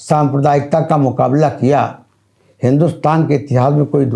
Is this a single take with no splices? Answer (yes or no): yes